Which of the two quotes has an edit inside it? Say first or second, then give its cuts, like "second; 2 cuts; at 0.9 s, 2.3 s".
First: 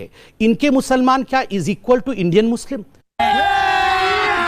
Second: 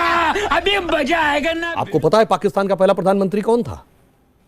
second; 1 cut; at 1.7 s